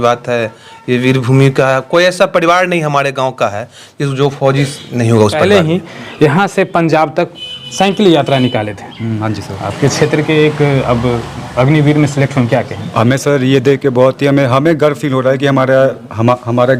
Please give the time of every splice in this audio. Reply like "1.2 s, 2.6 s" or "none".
5.4 s